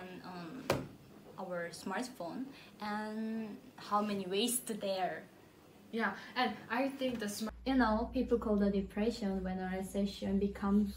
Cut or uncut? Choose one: cut